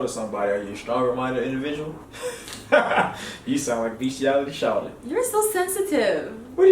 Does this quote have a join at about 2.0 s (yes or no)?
yes